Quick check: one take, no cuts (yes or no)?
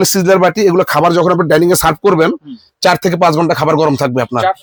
yes